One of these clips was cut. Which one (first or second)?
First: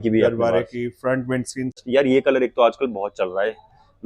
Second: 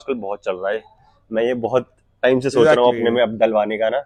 first